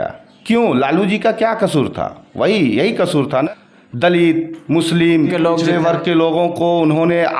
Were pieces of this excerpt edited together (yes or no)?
yes